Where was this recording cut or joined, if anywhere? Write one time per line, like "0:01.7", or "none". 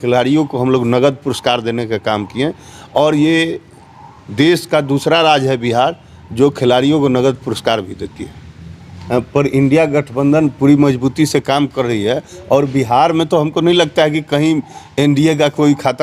0:08.9